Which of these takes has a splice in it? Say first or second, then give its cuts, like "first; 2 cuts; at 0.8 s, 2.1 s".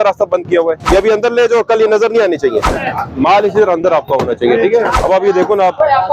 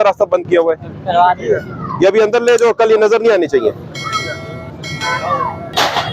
first; 3 cuts; at 0.8 s, 2.8 s, 4.9 s